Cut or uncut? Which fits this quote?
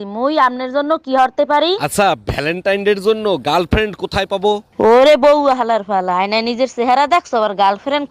uncut